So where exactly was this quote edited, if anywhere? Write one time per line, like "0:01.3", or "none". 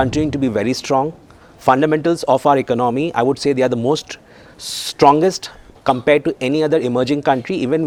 none